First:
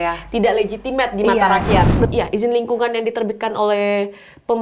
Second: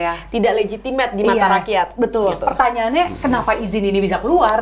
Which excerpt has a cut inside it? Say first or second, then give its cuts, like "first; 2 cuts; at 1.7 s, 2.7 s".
first; 1 cut; at 2.1 s